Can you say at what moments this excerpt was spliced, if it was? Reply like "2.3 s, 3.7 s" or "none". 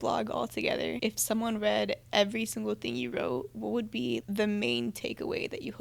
1.0 s, 4.2 s